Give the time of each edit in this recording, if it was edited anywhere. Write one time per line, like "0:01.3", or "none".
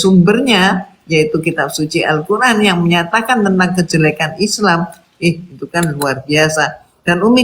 none

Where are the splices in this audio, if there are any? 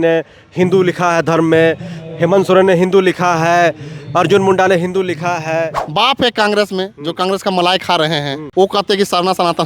0:05.8
0:08.4

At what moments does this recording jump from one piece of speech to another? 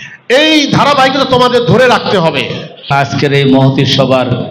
0:02.9

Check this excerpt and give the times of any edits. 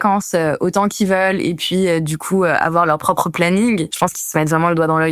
0:03.9

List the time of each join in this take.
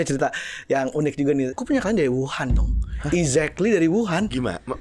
0:01.5

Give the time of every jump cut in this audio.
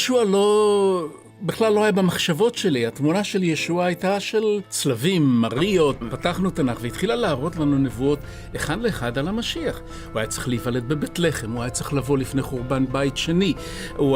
0:06.1

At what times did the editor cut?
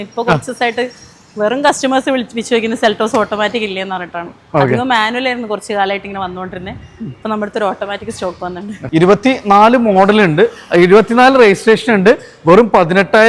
0:08.7

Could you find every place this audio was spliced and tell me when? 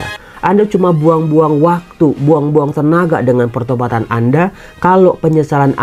none

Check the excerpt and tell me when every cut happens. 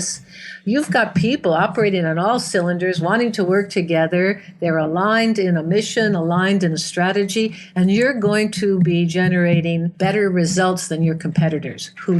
0:09.9

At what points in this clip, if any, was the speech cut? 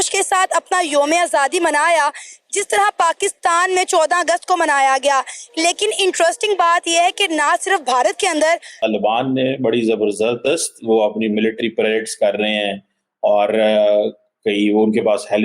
0:08.7

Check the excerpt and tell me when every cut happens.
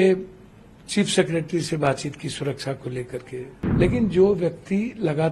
0:03.6

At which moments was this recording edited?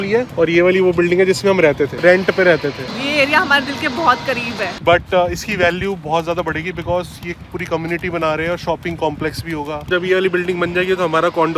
0:02.9
0:04.7
0:09.9

